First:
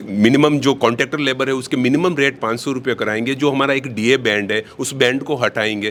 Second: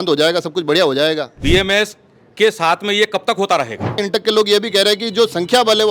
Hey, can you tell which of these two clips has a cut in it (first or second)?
second